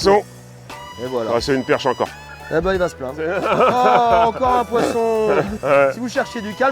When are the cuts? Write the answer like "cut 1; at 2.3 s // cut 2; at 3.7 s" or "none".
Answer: cut 1; at 3.3 s // cut 2; at 5.5 s